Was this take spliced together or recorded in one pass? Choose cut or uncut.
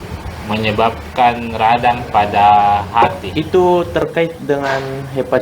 cut